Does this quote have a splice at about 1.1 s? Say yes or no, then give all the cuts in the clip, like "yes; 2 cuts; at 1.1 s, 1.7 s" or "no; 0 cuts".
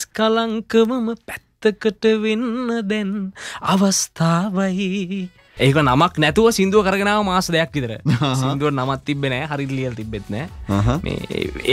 no; 1 cut; at 5.4 s